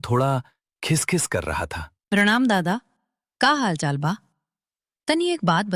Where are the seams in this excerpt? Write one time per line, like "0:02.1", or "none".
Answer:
0:01.9